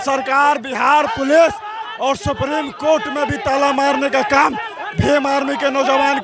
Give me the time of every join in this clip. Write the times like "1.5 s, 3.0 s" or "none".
none